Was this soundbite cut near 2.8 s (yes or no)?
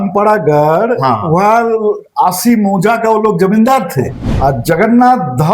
no